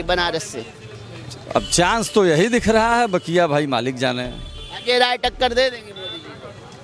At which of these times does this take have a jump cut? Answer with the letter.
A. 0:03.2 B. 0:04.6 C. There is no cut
C